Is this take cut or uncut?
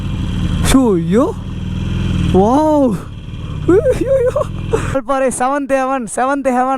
cut